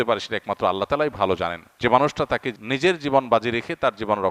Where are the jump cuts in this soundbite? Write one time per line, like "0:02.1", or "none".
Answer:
0:01.6
0:02.5